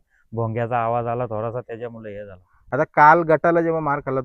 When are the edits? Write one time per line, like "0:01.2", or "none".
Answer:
0:02.5